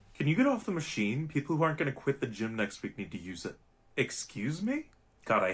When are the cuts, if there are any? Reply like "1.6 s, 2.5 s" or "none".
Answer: 1.4 s, 3.7 s